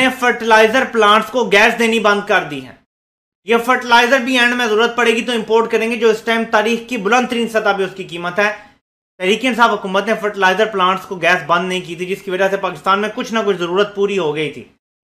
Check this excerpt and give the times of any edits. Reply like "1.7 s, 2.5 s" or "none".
none